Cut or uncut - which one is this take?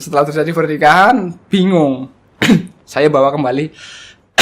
uncut